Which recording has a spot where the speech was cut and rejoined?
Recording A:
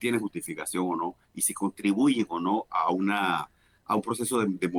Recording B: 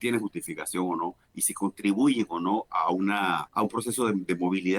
B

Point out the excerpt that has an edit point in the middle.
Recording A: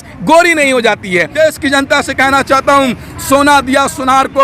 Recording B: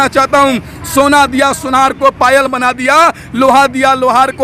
A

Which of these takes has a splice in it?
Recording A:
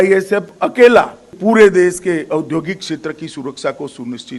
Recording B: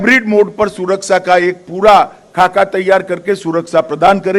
A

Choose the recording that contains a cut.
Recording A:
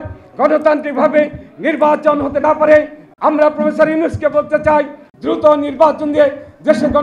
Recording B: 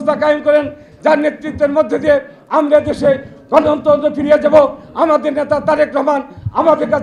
A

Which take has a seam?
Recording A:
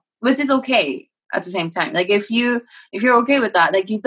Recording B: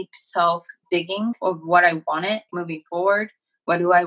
B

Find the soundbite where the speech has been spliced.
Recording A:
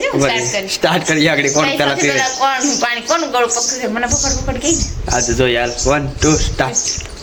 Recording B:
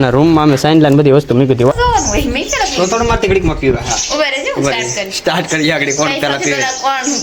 B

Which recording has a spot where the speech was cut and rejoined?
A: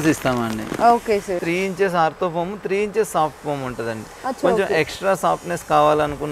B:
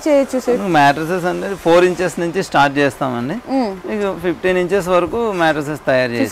A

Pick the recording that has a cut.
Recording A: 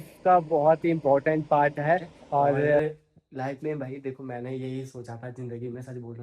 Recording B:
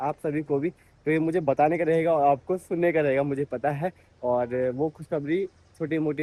A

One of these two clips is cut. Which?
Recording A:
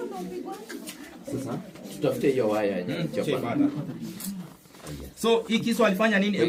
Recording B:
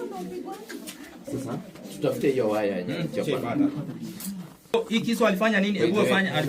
B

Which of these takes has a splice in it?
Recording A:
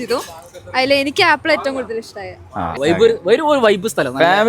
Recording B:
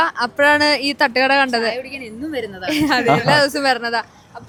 A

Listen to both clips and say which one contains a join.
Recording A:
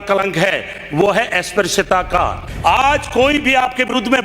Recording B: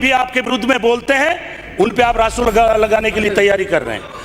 A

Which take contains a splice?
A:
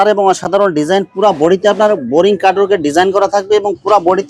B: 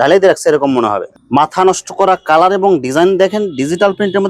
B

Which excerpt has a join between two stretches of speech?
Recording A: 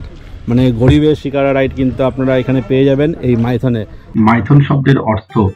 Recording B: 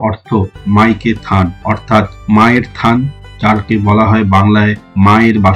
A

